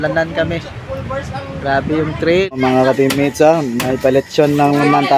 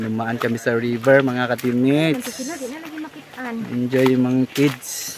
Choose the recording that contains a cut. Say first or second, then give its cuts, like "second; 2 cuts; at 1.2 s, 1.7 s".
first; 1 cut; at 2.4 s